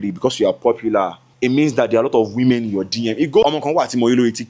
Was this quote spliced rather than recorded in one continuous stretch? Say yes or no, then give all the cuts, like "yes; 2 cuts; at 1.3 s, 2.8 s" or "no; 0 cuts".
yes; 2 cuts; at 1.2 s, 3.4 s